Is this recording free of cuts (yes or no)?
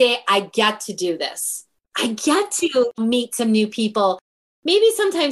no